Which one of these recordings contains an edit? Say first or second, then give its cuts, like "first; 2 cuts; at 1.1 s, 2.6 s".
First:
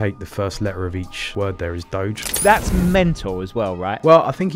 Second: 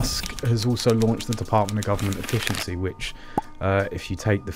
first; 2 cuts; at 1.3 s, 2.3 s